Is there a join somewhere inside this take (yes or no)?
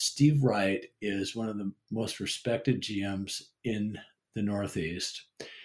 no